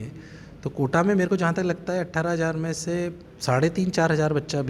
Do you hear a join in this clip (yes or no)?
yes